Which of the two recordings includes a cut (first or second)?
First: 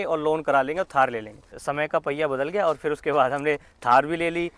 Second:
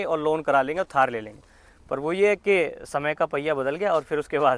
first